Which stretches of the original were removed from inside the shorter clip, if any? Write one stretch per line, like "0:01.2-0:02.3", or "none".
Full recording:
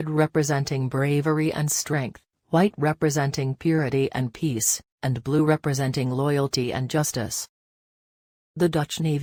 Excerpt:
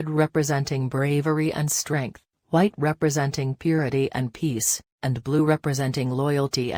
none